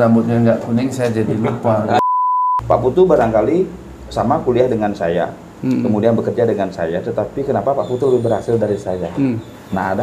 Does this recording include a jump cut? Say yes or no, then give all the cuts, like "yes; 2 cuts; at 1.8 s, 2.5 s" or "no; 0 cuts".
yes; 1 cut; at 2.1 s